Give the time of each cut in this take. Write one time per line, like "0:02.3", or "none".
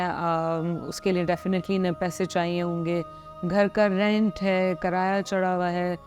none